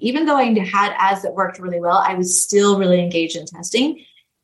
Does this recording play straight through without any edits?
yes; 0 cuts

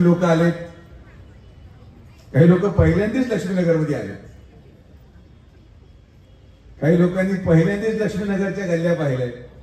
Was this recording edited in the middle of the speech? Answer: no; 0 cuts

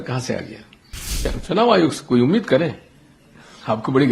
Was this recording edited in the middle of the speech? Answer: yes; 1 cut; at 1.2 s

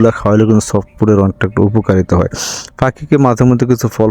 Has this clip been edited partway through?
no; 0 cuts

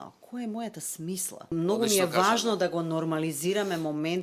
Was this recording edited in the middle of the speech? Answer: yes; 1 cut; at 1.5 s

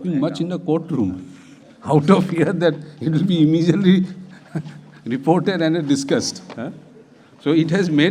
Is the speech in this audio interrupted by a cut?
no; 0 cuts

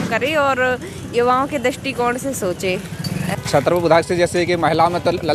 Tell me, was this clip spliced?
yes; 1 cut; at 3.3 s

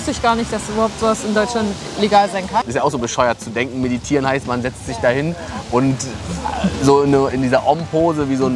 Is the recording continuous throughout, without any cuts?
no; 1 cut; at 2.7 s

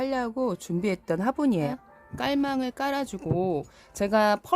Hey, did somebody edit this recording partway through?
yes; 1 cut; at 1.7 s

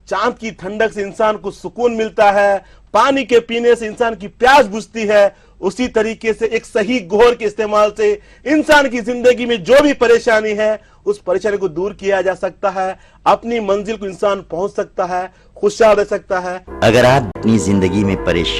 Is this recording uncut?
no; 2 cuts; at 16.5 s, 17.4 s

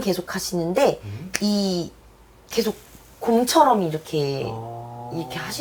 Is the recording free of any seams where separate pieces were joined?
yes; 0 cuts

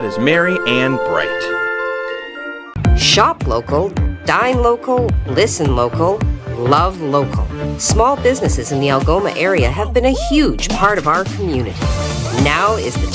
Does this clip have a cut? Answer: yes; 1 cut; at 2.6 s

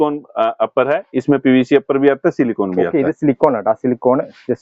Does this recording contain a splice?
no; 0 cuts

